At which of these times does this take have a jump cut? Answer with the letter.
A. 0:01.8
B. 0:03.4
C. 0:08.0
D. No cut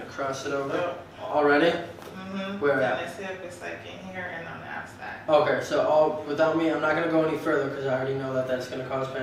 D